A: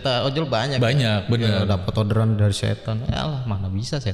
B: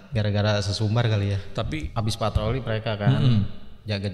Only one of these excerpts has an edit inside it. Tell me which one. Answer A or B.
B